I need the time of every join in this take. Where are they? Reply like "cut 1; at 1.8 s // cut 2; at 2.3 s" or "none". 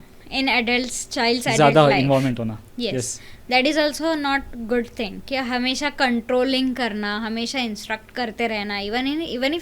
none